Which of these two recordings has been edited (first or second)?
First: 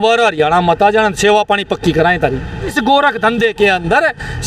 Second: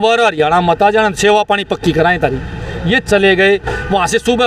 first